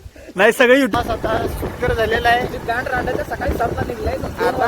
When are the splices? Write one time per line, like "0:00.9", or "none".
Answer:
0:00.9